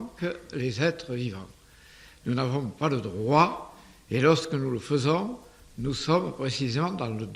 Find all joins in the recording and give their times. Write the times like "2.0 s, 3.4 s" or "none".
none